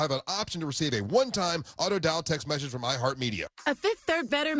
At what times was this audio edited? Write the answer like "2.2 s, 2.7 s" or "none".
3.5 s